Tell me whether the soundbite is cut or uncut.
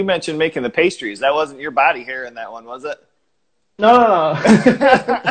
uncut